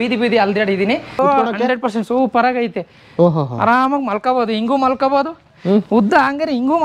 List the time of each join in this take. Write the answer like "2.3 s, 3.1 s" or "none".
1.2 s